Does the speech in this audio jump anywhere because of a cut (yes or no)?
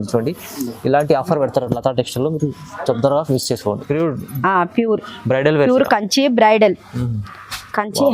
yes